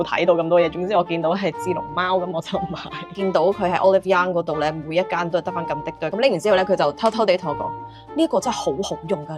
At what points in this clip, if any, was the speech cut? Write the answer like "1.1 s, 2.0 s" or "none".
3.1 s, 6.1 s